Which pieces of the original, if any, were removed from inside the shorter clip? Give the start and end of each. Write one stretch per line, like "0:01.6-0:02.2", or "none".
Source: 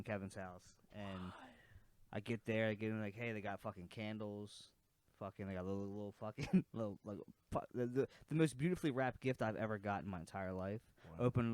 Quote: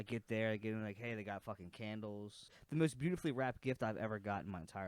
0:04.8-0:08.2